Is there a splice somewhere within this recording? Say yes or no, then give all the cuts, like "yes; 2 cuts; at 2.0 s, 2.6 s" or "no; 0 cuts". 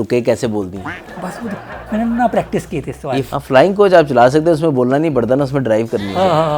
yes; 1 cut; at 3.3 s